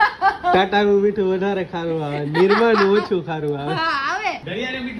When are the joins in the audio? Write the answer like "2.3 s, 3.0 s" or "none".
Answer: none